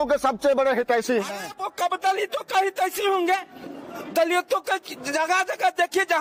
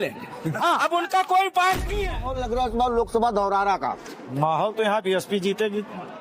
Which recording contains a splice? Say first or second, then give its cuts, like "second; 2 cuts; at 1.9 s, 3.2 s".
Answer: second; 1 cut; at 2.3 s